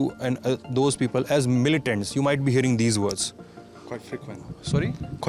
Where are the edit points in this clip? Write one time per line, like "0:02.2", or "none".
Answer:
none